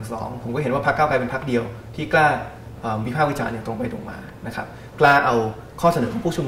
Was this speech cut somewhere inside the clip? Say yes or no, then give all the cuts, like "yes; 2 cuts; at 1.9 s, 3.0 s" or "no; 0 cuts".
no; 0 cuts